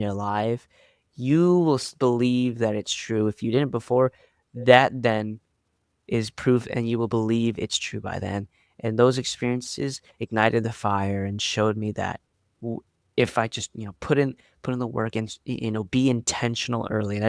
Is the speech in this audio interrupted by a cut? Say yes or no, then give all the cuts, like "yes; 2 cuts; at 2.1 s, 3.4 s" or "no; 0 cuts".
no; 0 cuts